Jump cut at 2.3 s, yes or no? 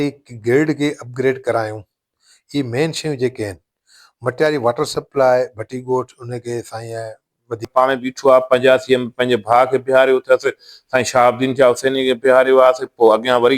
no